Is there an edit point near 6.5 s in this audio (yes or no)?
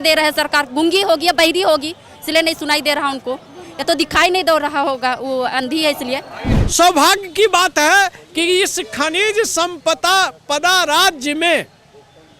yes